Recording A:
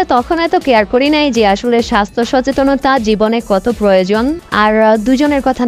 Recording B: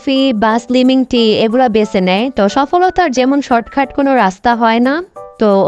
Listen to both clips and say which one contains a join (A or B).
A